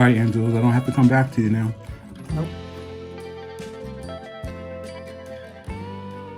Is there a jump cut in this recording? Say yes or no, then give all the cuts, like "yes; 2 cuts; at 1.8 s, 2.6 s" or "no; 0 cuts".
yes; 1 cut; at 2.5 s